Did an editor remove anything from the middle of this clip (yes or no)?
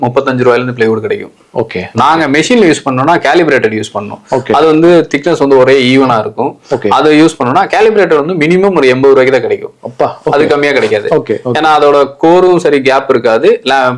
no